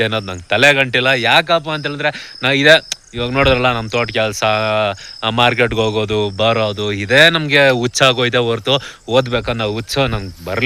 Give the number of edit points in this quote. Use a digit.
0